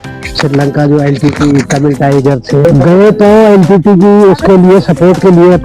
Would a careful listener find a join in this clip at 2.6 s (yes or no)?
yes